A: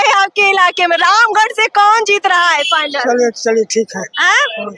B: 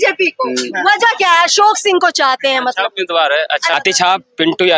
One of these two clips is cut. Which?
B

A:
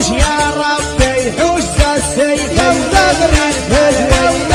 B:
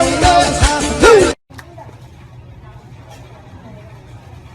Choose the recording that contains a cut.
B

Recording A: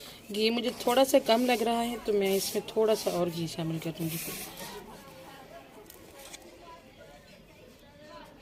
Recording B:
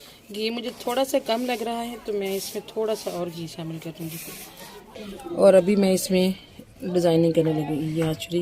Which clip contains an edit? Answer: B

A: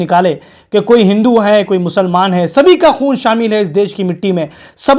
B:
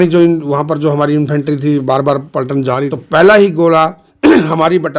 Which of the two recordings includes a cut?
B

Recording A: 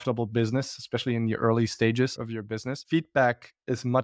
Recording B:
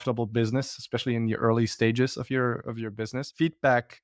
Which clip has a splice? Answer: A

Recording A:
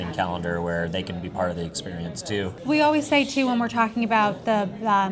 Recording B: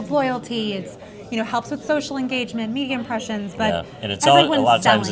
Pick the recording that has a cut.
A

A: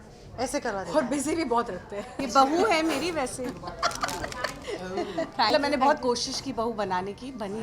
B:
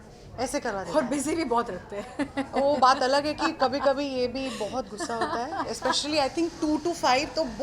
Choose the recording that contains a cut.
A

